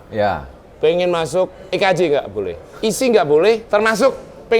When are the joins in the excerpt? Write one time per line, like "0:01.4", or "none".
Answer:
0:01.6
0:02.6
0:03.6